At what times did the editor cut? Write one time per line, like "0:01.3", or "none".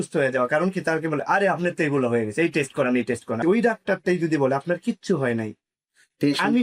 0:03.4